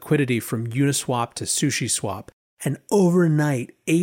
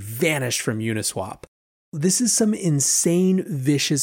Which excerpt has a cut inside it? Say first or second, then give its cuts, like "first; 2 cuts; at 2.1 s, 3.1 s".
second; 1 cut; at 1.9 s